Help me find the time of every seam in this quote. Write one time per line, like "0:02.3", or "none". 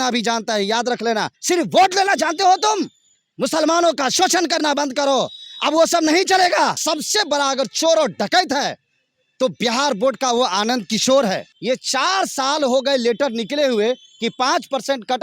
0:01.3
0:06.8
0:11.5